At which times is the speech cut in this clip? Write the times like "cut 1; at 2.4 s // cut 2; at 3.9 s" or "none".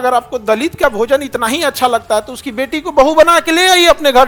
none